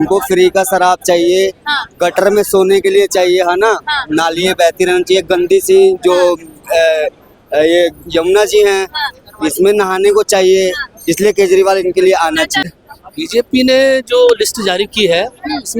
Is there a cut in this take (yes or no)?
yes